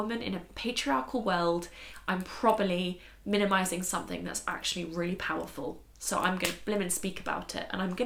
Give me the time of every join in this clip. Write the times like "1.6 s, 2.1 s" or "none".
none